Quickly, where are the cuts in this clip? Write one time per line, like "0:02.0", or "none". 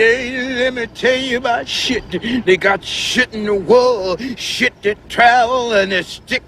0:01.2